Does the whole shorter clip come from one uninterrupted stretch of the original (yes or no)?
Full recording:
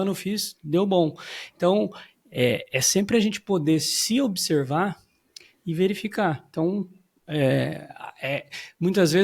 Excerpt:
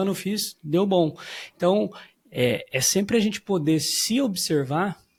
yes